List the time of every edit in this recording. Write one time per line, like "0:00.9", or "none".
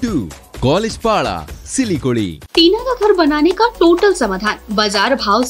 0:02.4

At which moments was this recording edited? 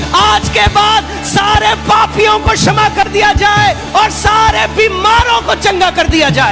none

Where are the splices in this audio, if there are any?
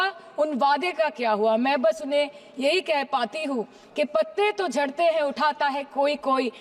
none

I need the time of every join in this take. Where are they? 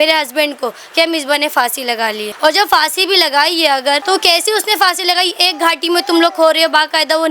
0:02.3
0:04.0

